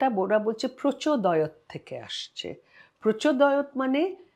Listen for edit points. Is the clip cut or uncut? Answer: uncut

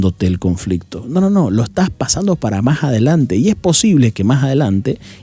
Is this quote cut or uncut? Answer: uncut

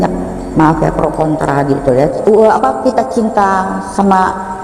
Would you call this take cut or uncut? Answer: cut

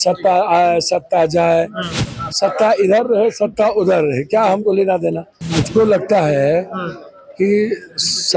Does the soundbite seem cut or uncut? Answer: cut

